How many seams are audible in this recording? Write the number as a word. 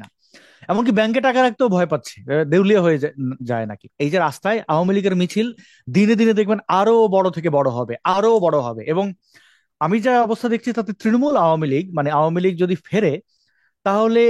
one